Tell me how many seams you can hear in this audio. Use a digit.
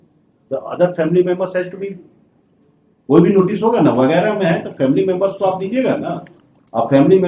0